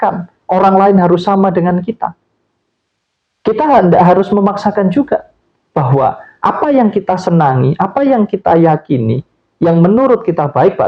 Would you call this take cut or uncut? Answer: uncut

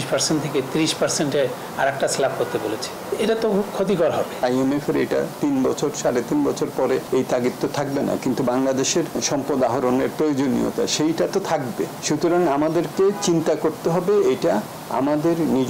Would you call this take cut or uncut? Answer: cut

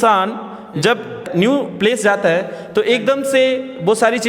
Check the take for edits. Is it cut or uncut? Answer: cut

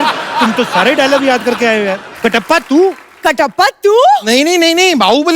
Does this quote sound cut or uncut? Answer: cut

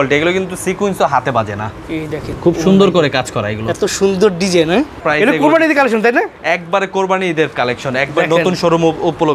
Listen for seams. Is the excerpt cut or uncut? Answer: cut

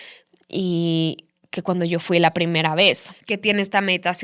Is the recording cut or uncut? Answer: cut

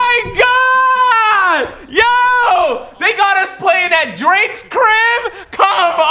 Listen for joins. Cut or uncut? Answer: uncut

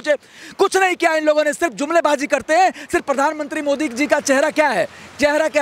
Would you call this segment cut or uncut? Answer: uncut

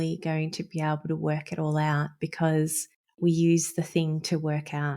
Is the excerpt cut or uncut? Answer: cut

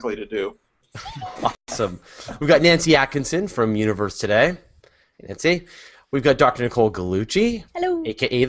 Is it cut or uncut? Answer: cut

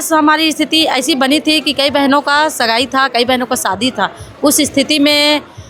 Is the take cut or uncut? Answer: uncut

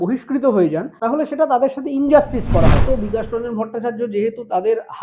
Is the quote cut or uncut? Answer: cut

